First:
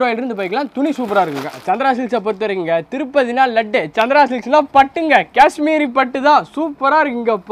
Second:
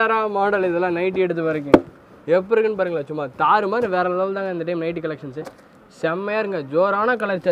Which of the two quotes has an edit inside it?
first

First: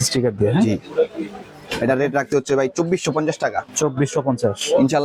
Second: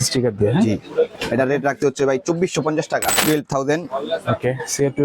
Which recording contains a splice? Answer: second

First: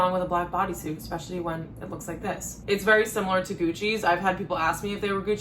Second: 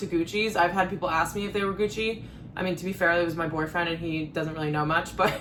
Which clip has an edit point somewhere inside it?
first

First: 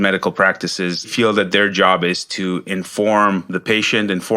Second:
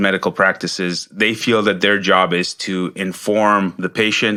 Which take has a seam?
first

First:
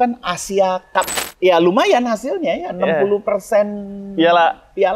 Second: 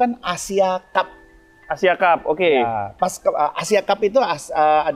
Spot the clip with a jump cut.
first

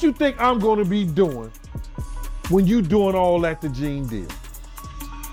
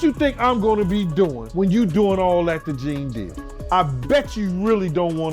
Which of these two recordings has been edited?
second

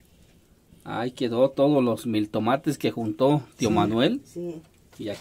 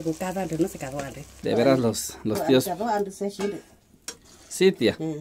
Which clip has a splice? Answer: second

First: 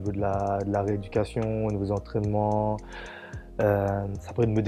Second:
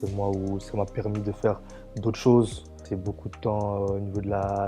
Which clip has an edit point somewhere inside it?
second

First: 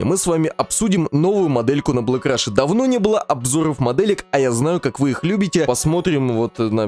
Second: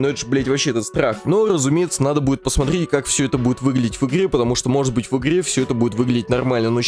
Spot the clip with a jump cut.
first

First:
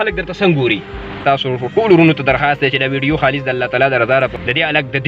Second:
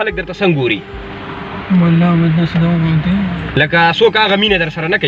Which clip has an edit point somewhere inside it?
first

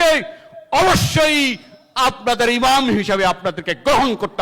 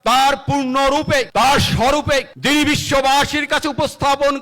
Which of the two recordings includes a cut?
second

